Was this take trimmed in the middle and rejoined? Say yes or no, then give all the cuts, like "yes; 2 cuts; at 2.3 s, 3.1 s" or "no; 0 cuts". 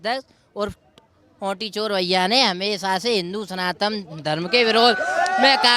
no; 0 cuts